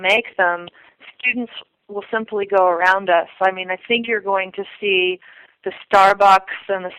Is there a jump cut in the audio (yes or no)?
no